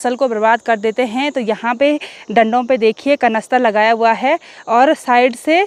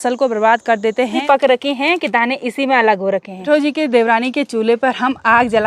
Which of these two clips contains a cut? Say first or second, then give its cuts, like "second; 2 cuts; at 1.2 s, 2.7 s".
second; 2 cuts; at 1.2 s, 3.5 s